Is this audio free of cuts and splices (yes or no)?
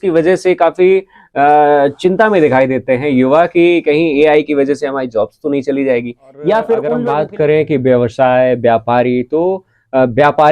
no